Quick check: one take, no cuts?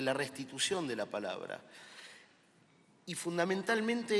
no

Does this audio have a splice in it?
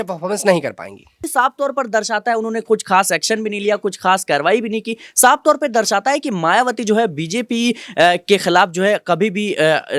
yes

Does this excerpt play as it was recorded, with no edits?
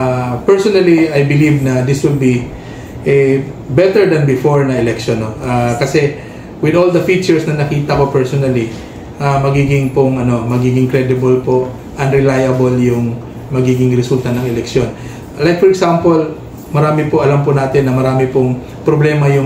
yes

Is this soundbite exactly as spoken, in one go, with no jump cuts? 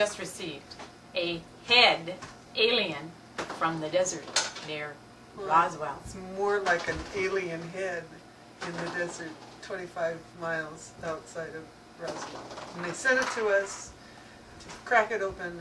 yes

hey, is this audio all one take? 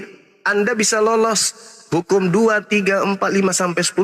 yes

